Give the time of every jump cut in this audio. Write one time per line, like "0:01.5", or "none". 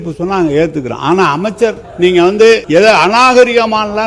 0:01.8
0:03.1